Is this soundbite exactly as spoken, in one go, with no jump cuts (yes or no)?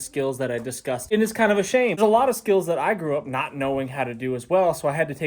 no